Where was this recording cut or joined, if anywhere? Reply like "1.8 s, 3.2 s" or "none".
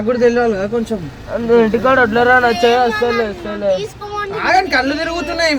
none